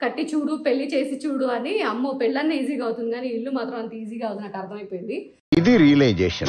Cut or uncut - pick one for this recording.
uncut